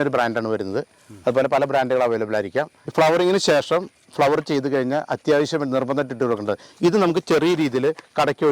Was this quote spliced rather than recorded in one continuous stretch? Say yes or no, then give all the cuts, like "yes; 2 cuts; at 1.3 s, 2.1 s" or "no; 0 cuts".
no; 0 cuts